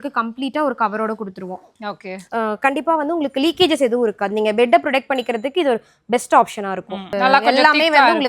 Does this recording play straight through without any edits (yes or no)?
no